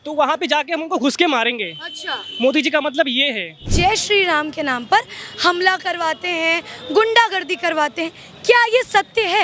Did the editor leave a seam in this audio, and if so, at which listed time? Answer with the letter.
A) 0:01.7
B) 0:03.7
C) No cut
B